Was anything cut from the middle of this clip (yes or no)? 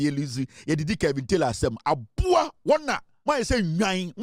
yes